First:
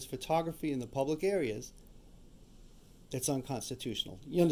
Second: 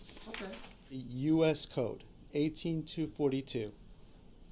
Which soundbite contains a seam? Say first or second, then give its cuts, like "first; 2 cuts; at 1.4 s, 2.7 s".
second; 1 cut; at 1.1 s